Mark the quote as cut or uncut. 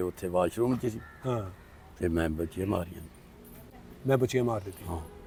uncut